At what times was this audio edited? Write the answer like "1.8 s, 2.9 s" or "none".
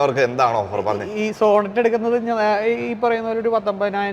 none